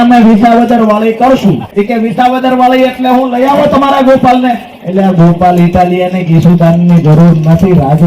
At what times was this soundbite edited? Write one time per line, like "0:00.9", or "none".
0:01.6